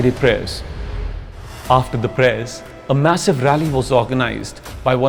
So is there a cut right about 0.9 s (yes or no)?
yes